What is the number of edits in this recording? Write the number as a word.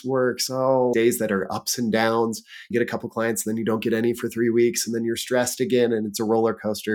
one